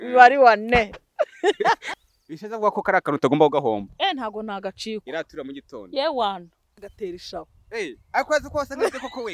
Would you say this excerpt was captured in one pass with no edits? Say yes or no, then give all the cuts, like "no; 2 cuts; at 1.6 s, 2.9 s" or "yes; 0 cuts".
no; 2 cuts; at 1.9 s, 6.9 s